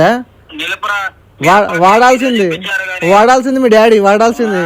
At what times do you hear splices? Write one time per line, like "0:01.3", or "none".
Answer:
none

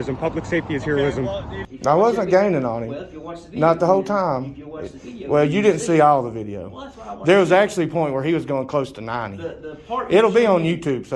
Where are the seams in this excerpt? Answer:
0:01.6

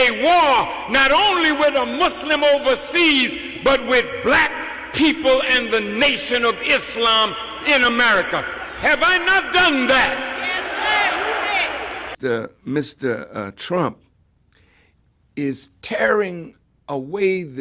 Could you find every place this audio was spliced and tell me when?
0:12.1

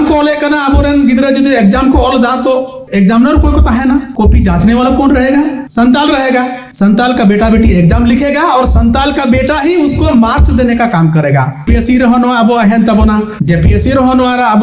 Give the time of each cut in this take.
0:02.8
0:04.1
0:05.6
0:06.6
0:11.7
0:13.3

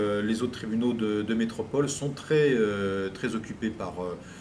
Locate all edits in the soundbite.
0:02.6

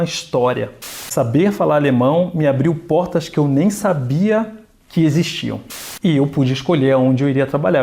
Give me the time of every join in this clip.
0:00.9
0:05.7

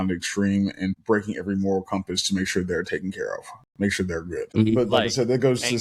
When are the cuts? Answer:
0:01.0
0:04.8

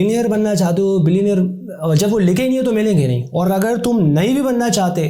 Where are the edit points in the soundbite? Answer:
none

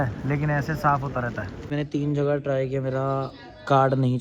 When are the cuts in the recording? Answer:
0:01.6

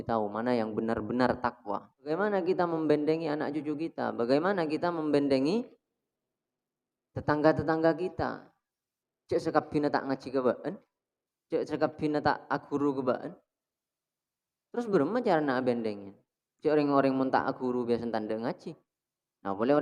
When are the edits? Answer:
0:02.1

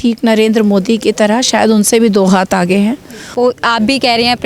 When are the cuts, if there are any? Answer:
0:03.3

